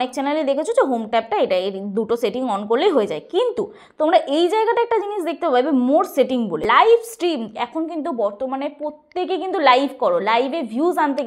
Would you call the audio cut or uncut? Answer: cut